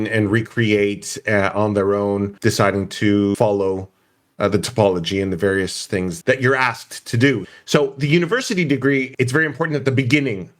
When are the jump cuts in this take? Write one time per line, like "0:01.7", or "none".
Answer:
0:02.3
0:03.3
0:06.2
0:07.4
0:09.1